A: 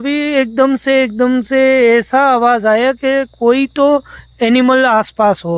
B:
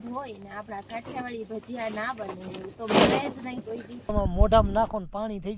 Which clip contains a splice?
B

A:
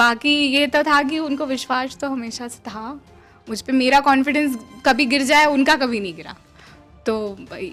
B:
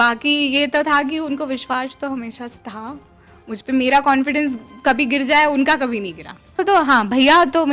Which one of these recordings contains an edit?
B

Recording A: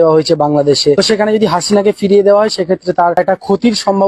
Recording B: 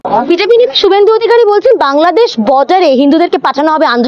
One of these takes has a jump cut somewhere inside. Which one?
A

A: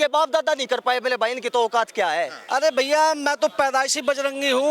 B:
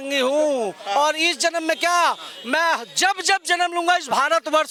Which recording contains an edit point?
A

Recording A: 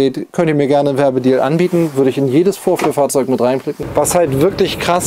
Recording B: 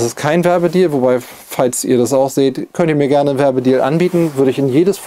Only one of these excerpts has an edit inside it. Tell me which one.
A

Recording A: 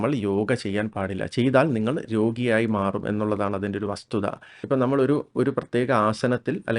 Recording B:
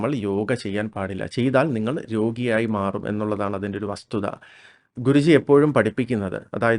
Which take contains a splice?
A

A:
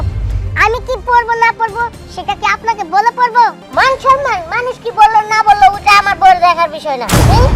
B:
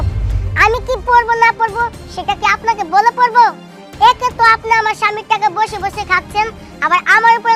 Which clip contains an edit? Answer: A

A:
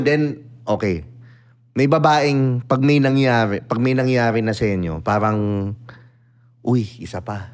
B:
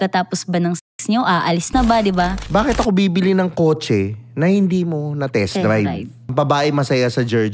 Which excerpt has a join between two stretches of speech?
B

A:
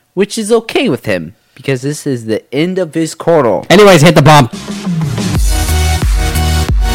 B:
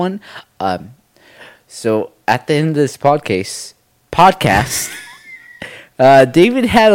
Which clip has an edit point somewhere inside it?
A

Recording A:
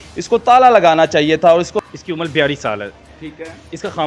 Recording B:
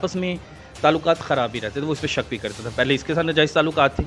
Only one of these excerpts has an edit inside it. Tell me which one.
A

